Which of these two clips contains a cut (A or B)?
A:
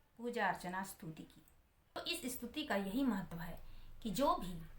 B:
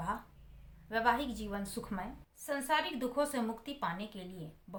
A